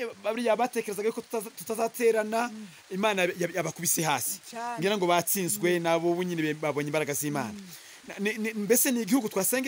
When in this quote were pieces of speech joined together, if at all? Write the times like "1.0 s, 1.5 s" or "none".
none